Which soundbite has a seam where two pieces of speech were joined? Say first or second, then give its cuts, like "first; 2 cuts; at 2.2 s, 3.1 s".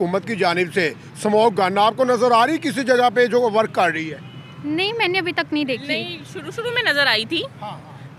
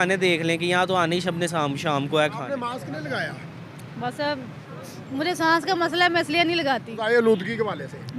second; 2 cuts; at 2.6 s, 7.0 s